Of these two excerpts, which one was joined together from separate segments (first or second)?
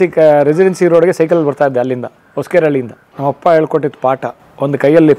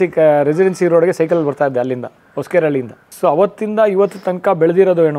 first